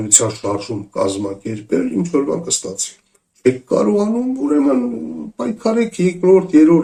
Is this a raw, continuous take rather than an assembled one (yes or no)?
yes